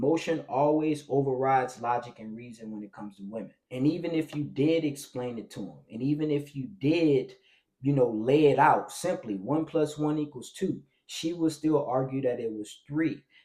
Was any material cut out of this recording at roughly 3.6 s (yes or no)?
yes